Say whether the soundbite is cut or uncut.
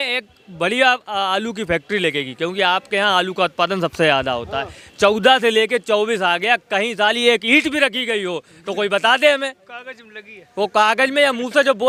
uncut